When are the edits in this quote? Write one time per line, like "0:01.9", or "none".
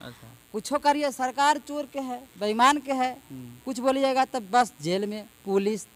none